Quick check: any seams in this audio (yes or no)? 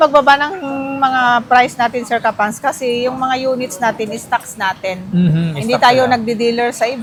no